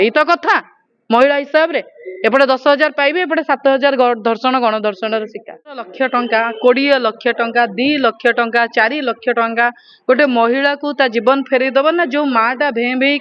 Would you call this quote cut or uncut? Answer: cut